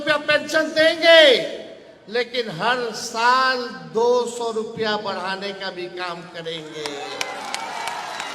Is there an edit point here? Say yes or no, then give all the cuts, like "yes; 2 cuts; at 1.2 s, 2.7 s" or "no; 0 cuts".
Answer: no; 0 cuts